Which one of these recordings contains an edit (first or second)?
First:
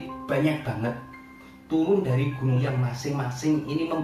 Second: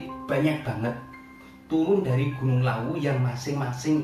first